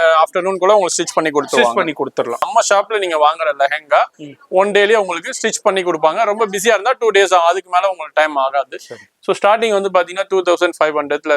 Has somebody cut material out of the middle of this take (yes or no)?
yes